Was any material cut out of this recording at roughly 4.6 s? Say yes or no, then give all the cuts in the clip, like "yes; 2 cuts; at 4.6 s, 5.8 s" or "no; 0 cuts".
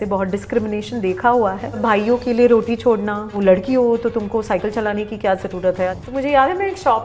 no; 3 cuts; at 1.8 s, 3.3 s, 5.9 s